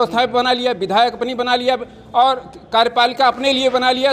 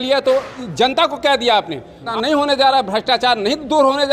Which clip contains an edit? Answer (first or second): second